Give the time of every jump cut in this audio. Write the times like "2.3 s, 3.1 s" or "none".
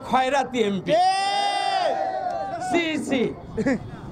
none